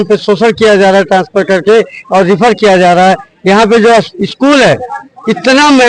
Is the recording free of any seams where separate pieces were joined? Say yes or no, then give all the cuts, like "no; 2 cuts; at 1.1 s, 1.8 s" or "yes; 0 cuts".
yes; 0 cuts